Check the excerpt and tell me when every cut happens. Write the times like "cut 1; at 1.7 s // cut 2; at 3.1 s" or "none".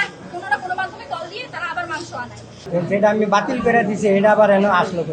cut 1; at 2.7 s